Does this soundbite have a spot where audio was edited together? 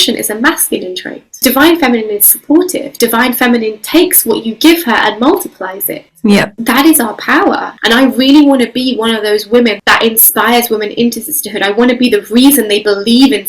yes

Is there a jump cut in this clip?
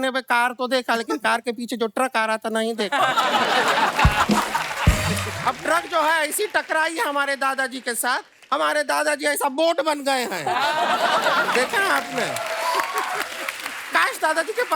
no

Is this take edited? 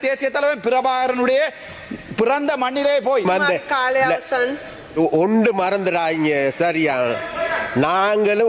yes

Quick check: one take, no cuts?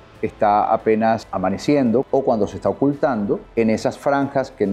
no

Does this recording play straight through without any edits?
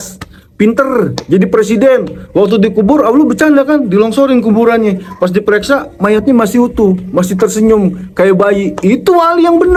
yes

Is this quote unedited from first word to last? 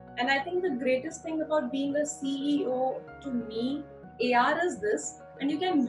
no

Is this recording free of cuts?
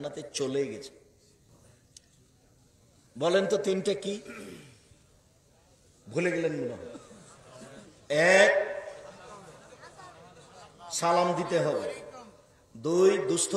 yes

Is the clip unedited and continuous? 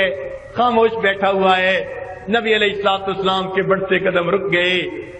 no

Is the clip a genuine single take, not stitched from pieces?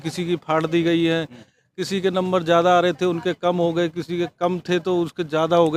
yes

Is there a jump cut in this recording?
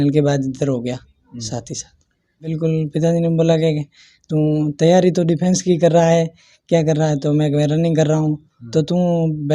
yes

